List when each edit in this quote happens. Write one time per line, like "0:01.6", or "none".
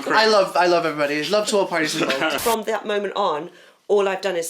0:02.4